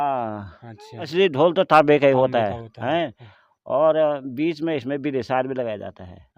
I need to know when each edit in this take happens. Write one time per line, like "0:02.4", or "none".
0:01.0